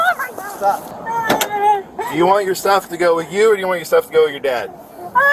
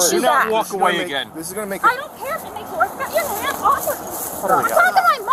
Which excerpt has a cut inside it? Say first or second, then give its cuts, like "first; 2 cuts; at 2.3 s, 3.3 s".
first; 1 cut; at 0.9 s